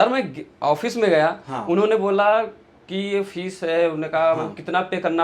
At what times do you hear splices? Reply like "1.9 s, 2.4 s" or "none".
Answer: none